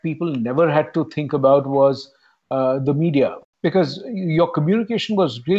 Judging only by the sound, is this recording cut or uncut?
cut